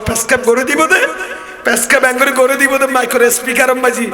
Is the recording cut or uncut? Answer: uncut